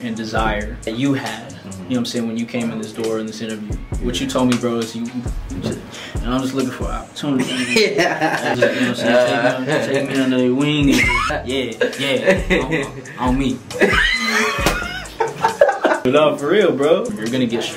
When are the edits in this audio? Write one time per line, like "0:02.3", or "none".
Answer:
none